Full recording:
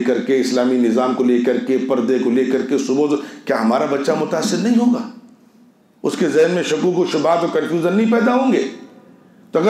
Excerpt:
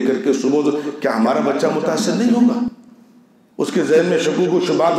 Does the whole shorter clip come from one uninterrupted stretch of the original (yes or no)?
yes